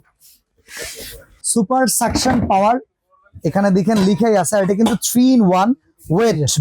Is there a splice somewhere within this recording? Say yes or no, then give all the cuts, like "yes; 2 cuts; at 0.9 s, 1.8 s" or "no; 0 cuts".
yes; 1 cut; at 1.3 s